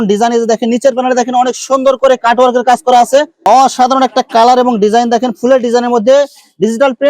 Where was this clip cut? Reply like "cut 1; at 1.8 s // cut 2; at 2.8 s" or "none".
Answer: cut 1; at 3.5 s